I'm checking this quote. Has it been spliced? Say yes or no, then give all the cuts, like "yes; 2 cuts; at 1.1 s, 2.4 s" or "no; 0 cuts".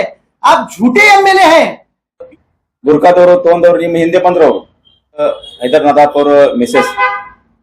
yes; 1 cut; at 2.2 s